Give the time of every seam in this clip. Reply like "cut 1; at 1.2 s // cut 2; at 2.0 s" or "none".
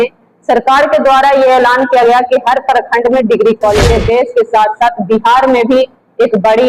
cut 1; at 3.9 s